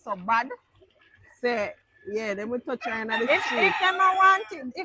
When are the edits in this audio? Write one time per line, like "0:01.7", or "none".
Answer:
none